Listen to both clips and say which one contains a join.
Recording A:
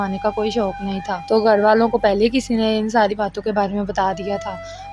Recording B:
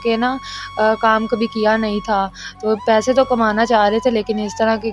A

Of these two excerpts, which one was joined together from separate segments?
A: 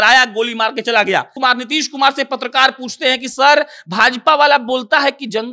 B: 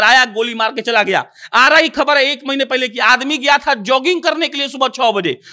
A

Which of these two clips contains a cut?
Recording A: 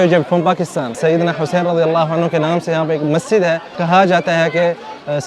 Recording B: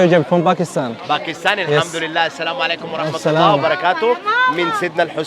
A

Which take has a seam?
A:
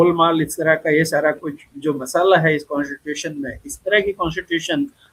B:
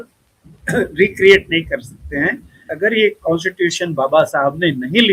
B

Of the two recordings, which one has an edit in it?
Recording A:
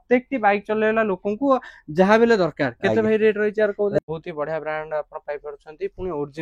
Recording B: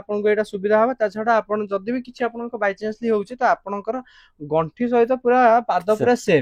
A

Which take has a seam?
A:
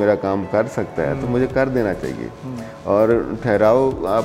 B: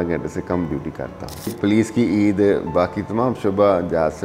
B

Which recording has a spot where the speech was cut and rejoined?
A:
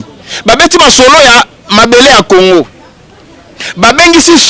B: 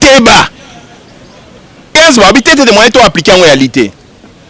B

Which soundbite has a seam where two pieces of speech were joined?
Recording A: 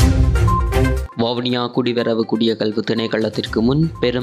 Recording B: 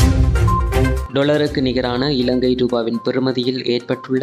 B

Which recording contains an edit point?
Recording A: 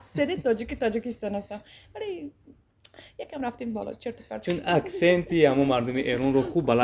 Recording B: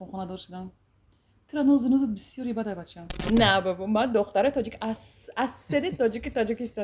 B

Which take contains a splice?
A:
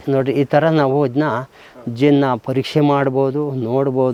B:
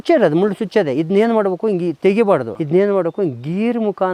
B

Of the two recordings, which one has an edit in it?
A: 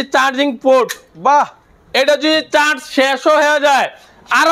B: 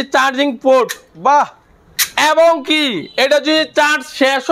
A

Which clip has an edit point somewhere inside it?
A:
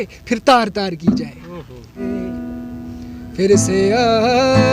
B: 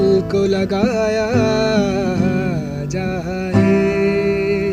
A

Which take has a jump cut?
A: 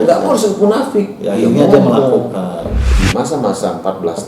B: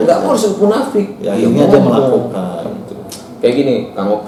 A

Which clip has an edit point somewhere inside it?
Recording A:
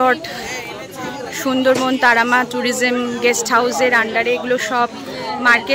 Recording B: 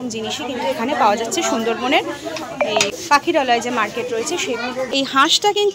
B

